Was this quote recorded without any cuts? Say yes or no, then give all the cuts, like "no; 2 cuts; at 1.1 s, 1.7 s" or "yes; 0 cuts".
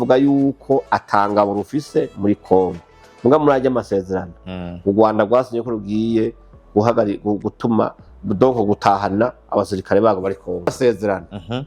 no; 1 cut; at 10.7 s